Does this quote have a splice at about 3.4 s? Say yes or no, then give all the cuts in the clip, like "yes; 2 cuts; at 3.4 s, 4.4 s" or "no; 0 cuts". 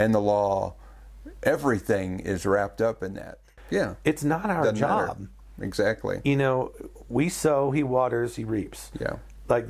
yes; 1 cut; at 3.4 s